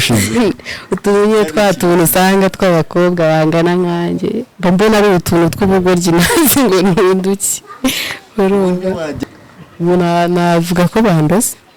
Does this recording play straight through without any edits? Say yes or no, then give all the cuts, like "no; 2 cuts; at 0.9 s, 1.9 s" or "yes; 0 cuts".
no; 1 cut; at 9.1 s